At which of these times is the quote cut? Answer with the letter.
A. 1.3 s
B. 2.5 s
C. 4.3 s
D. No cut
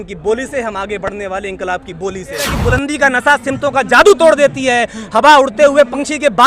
B